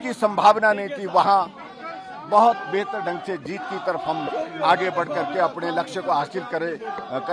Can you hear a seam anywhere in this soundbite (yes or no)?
no